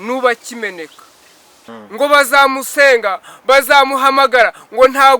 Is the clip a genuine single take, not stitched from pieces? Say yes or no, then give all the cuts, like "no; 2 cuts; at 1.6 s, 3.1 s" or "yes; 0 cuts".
no; 1 cut; at 1.6 s